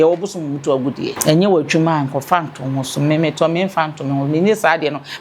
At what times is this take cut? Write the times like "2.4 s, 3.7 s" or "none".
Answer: 1.2 s